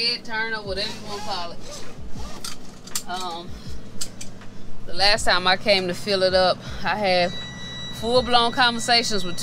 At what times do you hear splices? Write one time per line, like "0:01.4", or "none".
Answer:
none